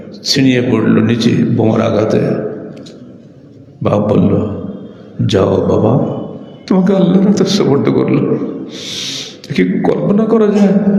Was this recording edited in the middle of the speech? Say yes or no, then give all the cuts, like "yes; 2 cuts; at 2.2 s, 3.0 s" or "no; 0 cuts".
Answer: no; 0 cuts